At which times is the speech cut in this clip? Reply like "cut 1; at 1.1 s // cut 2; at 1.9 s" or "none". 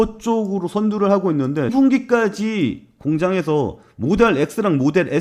cut 1; at 1.7 s